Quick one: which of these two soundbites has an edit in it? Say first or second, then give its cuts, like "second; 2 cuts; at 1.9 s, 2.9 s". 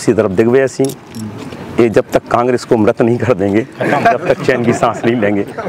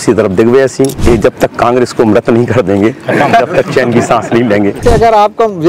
second; 2 cuts; at 1.0 s, 4.8 s